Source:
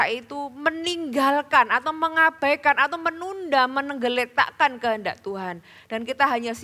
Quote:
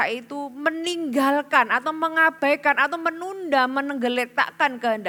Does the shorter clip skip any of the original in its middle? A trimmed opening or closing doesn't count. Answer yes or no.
no